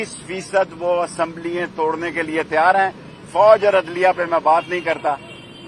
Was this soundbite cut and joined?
no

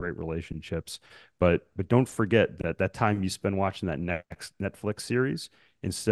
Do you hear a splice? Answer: no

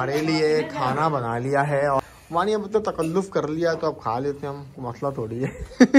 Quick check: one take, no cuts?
no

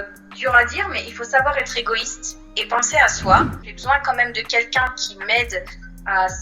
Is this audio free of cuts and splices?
no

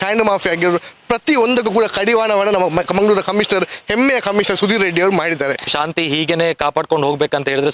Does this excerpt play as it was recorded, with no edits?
no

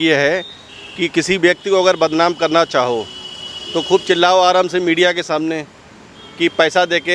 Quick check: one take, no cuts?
yes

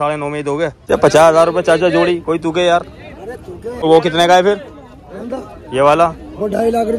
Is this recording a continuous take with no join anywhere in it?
no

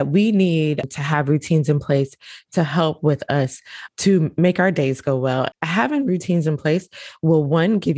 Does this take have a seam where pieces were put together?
yes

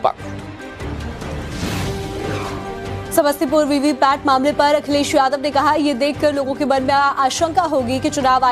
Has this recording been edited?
no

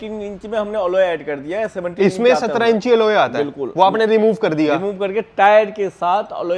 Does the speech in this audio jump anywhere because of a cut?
no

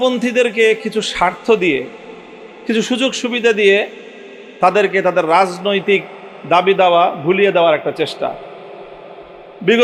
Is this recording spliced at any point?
no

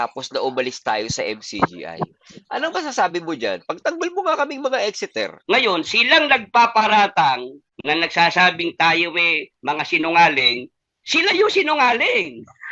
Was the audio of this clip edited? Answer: yes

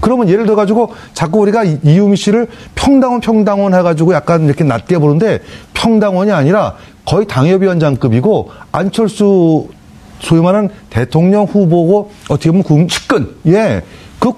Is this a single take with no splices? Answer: no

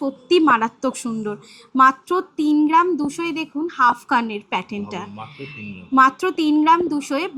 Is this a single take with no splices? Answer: yes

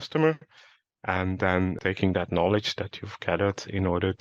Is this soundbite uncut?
no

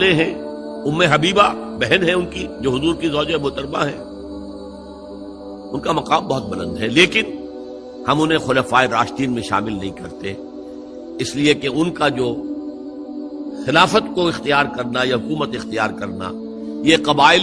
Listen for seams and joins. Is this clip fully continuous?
yes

